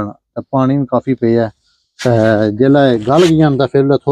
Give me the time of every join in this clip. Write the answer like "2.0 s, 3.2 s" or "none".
none